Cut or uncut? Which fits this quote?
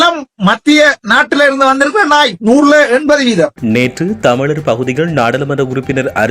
cut